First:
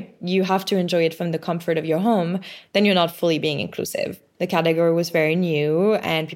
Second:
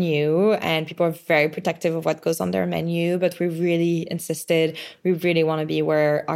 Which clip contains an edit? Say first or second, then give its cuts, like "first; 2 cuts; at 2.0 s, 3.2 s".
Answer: first; 1 cut; at 4.2 s